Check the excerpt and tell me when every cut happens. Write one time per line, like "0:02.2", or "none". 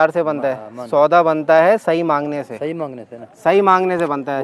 none